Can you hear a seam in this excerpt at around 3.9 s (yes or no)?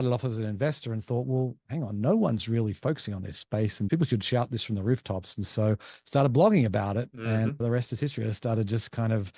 yes